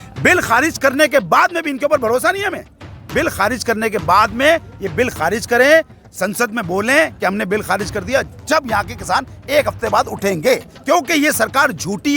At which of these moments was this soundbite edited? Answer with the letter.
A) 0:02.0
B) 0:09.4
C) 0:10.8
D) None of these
D